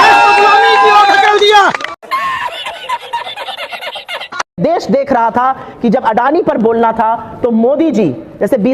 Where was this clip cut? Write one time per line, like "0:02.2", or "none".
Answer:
none

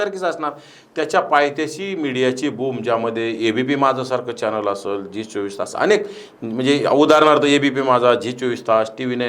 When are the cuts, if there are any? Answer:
none

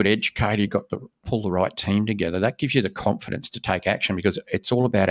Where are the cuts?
none

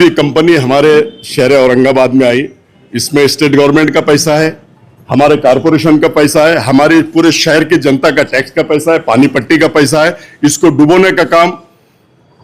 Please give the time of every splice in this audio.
none

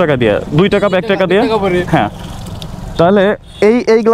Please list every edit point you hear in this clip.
none

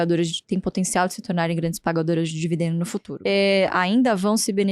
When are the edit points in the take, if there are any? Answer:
0:03.1

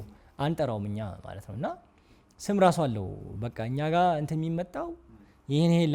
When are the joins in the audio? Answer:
none

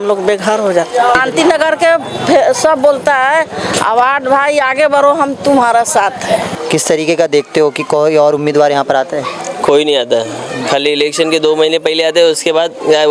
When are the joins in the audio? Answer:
0:01.2
0:06.5

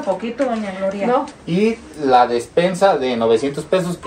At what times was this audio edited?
0:01.3

